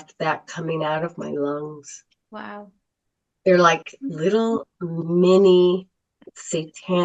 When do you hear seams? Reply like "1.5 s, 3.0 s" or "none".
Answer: none